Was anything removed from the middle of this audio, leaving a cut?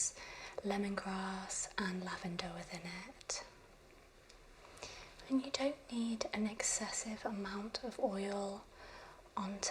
yes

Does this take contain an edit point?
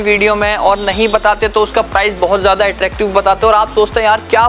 no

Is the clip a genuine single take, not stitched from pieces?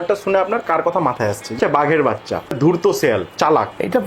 no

